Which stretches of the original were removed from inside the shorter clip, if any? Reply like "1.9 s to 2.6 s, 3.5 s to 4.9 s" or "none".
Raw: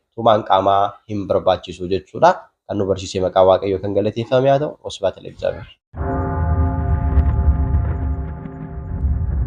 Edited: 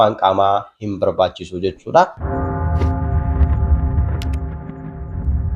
2.5 s to 6.0 s